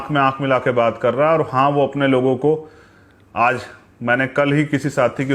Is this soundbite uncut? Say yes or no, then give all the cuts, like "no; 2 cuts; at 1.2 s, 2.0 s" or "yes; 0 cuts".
yes; 0 cuts